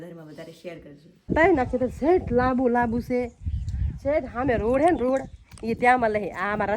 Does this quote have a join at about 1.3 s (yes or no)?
yes